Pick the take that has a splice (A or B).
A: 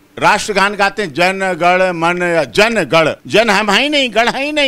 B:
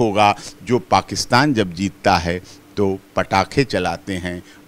A